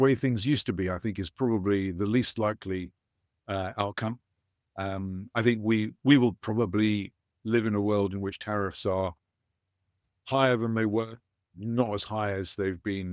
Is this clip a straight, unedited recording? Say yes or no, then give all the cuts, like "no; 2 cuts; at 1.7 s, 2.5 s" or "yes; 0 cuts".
yes; 0 cuts